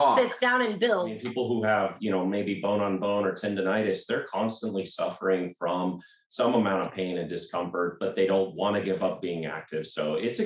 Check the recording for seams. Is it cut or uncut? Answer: cut